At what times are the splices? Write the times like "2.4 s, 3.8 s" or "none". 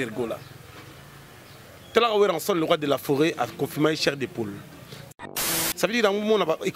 5.1 s